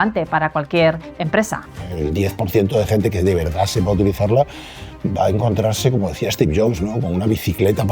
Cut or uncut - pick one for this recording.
cut